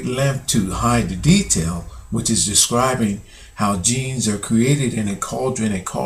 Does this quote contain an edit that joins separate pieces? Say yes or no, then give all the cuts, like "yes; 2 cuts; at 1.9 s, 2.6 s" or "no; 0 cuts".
yes; 1 cut; at 3.7 s